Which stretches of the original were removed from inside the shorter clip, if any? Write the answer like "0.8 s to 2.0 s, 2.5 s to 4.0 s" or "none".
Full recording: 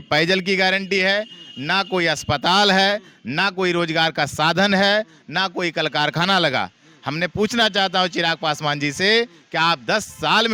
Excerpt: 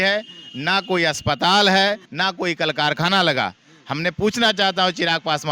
3.1 s to 5.2 s